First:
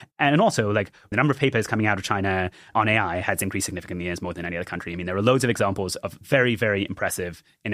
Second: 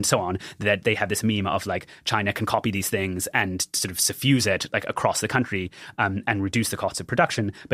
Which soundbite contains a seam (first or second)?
first